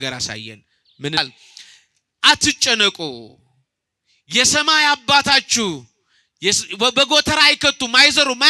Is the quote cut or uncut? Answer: cut